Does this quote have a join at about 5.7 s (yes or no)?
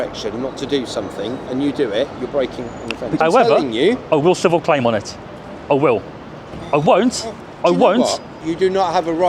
no